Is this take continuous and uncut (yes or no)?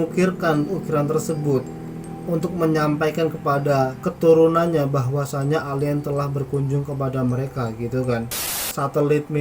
no